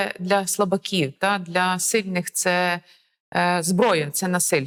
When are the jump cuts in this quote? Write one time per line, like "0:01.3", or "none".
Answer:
none